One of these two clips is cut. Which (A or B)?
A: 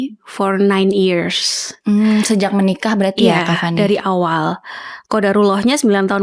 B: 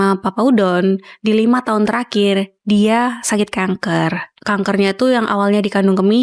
B